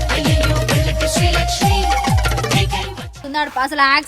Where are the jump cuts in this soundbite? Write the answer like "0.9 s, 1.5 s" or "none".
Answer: 3.1 s